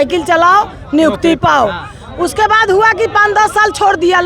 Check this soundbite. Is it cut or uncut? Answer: uncut